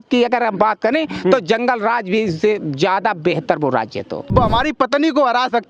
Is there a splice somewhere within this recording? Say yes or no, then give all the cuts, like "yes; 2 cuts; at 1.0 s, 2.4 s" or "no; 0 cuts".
yes; 1 cut; at 4.3 s